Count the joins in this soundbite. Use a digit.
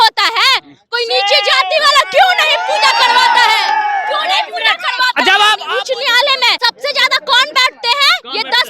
2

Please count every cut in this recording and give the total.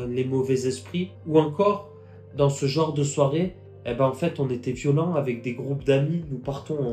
0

